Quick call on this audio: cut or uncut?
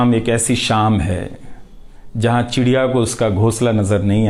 uncut